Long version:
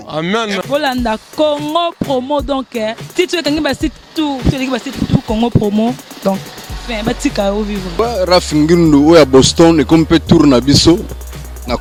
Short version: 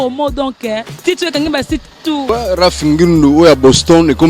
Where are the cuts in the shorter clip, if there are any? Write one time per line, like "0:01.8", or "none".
0:02.2